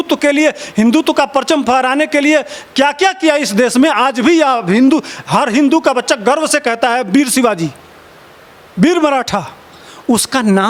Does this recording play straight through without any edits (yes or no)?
yes